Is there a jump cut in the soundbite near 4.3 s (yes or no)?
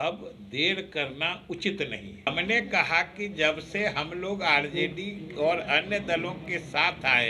no